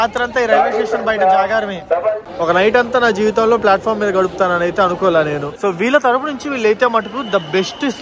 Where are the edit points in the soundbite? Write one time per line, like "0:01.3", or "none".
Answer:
0:02.2
0:05.5

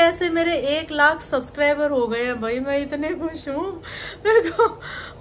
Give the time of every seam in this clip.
none

